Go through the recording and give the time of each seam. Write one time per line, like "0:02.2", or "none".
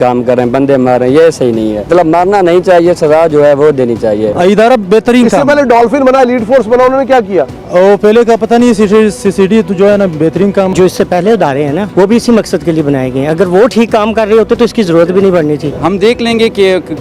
0:01.9
0:04.3
0:10.7
0:11.9
0:15.7